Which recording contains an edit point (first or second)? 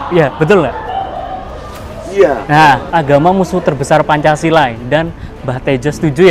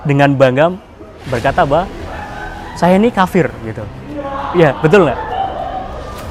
first